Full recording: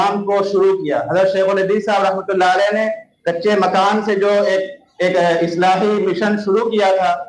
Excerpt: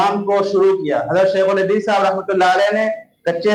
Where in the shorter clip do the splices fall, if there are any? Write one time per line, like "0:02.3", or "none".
none